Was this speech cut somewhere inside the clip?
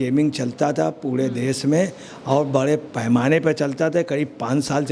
no; 0 cuts

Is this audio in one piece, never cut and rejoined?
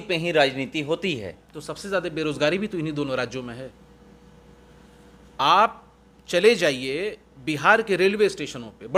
yes; 0 cuts

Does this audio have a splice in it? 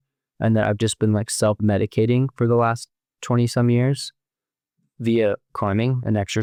no; 0 cuts

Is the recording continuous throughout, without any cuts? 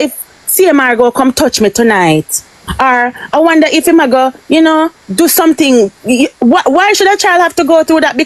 yes; 0 cuts

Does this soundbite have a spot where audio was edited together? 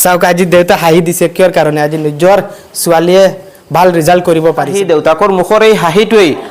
yes; 1 cut; at 4.7 s

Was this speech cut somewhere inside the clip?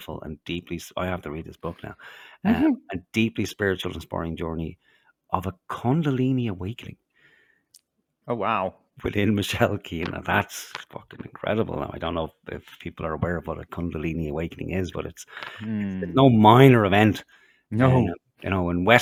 no; 0 cuts

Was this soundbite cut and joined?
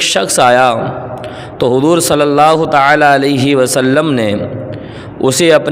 no; 0 cuts

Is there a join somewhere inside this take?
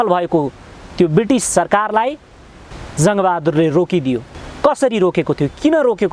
yes; 1 cut; at 4.3 s

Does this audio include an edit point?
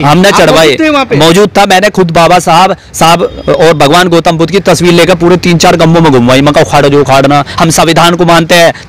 no; 0 cuts

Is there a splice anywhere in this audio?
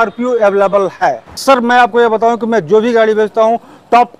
yes; 1 cut; at 1.3 s

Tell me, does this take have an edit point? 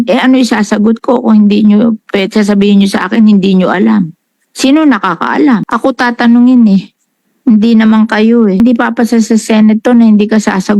yes; 2 cuts; at 5.7 s, 8.6 s

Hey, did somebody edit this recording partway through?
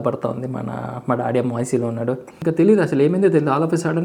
yes; 1 cut; at 2.3 s

